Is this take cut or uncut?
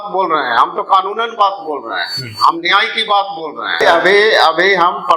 cut